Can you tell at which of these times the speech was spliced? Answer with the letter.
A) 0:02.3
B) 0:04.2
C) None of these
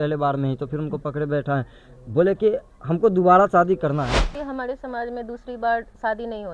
B